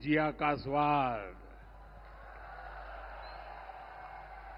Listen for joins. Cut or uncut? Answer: uncut